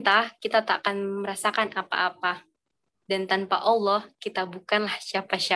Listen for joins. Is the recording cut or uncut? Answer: uncut